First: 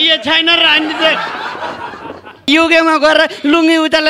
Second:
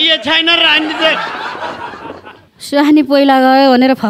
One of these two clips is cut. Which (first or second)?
first